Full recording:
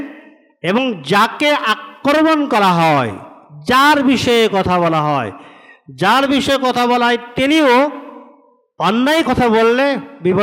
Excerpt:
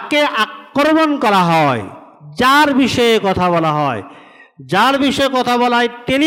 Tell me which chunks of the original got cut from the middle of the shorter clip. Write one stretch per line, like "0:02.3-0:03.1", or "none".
none